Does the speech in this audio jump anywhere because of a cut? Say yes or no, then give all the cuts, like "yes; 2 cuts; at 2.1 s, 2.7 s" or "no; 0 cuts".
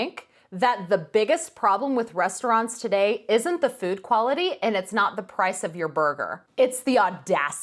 no; 0 cuts